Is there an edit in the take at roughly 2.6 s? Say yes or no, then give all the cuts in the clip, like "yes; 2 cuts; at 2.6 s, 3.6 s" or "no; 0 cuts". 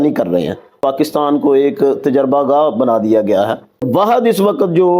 no; 2 cuts; at 0.8 s, 3.8 s